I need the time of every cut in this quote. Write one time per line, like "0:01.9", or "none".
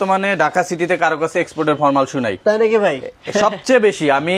none